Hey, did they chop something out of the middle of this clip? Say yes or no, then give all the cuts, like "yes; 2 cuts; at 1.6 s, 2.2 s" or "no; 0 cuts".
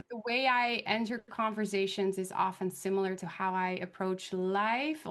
no; 0 cuts